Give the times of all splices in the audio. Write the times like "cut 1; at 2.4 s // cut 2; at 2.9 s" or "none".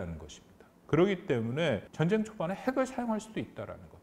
cut 1; at 1.9 s